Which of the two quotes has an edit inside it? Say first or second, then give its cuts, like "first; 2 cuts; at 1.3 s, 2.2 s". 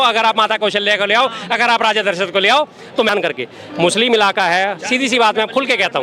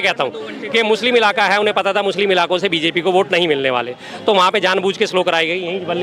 first; 1 cut; at 3.1 s